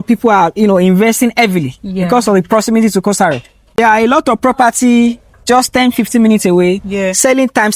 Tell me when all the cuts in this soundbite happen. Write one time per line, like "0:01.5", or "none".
0:03.8